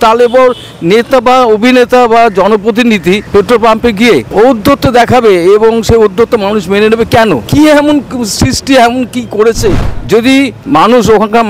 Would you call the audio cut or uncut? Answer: cut